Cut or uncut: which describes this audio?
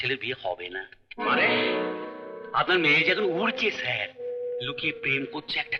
uncut